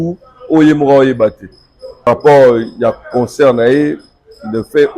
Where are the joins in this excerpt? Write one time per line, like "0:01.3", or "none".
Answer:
0:02.1